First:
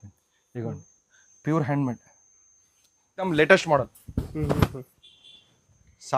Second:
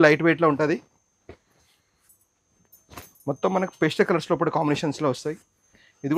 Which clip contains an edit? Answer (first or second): first